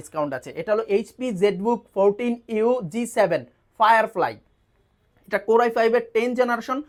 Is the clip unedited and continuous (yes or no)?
yes